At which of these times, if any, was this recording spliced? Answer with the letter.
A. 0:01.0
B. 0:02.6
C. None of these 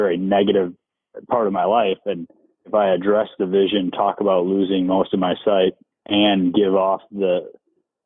B